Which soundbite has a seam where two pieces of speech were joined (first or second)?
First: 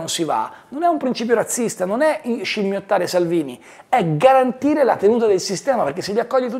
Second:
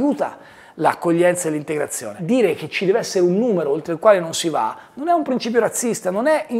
second